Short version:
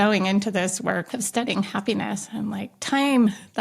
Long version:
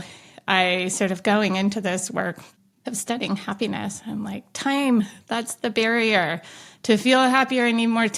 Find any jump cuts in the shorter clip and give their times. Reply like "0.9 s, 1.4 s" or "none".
1.1 s

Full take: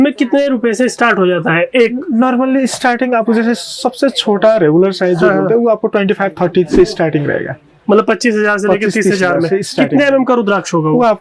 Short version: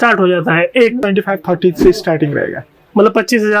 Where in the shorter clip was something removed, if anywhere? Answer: 1.0 s

